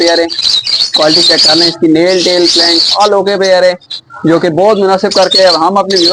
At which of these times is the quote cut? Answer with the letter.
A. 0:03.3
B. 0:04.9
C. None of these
C